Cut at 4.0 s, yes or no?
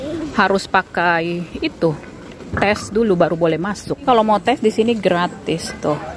yes